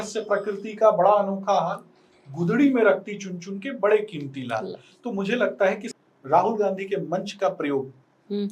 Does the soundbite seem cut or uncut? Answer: cut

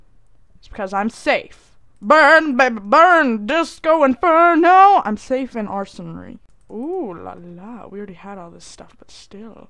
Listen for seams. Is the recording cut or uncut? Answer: uncut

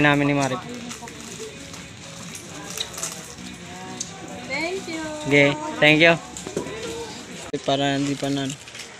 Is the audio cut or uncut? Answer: cut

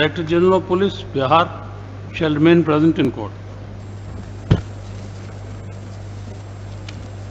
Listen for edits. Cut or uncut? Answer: uncut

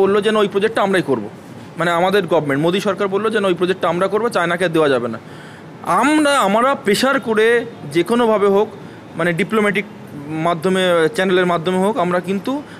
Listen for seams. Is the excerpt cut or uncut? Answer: uncut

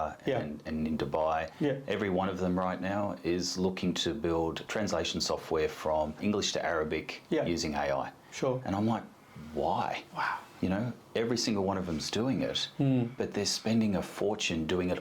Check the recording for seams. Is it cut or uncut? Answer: cut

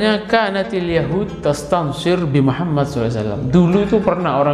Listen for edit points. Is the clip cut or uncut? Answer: uncut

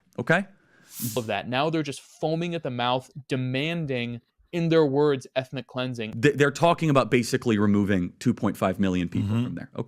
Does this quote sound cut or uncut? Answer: cut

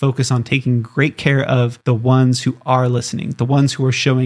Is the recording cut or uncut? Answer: uncut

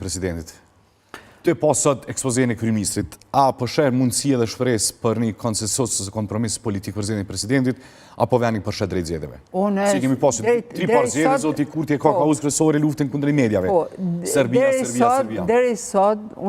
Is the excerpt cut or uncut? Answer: uncut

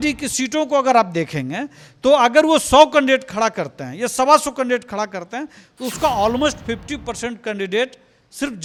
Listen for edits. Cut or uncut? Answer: uncut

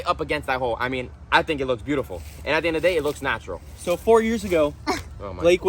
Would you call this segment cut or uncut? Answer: uncut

